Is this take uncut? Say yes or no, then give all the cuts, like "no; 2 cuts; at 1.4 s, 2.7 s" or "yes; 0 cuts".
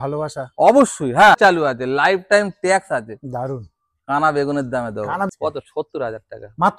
no; 2 cuts; at 1.4 s, 5.3 s